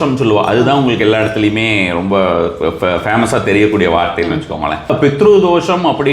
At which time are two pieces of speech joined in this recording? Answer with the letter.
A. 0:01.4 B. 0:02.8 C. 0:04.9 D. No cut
C